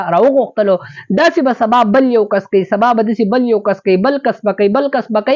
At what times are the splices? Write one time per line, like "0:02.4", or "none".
none